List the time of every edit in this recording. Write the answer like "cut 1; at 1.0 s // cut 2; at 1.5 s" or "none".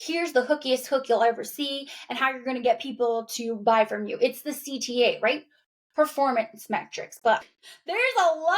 cut 1; at 7.5 s